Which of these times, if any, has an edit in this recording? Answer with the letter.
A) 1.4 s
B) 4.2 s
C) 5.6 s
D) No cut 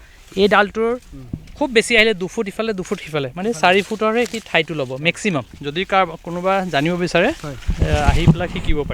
C